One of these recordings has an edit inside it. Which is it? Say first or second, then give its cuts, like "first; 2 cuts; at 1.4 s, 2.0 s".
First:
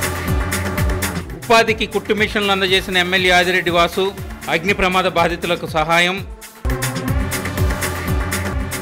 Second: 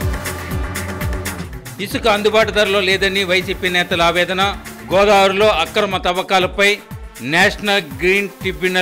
first; 1 cut; at 1.2 s